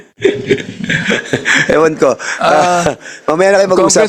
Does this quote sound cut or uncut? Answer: uncut